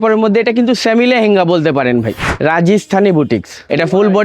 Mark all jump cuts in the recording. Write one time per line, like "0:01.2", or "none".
0:02.2